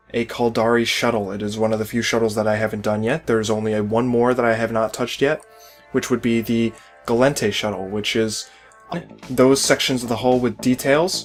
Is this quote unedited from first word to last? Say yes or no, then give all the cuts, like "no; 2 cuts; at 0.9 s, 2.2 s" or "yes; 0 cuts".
yes; 0 cuts